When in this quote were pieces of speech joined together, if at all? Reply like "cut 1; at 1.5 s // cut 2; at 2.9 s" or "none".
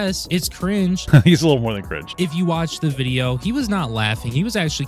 cut 1; at 1.1 s // cut 2; at 2.1 s